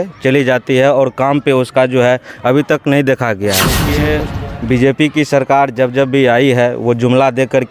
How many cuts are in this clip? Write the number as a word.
one